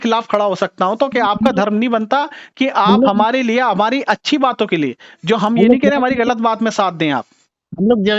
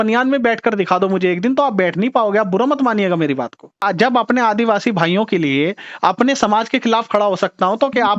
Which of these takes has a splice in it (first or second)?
second